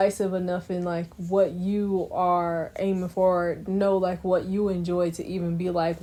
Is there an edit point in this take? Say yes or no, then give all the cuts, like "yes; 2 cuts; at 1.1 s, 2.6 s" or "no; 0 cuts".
no; 0 cuts